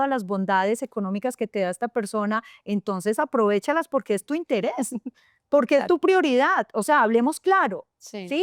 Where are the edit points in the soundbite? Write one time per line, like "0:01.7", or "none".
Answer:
none